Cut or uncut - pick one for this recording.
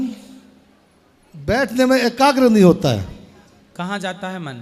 uncut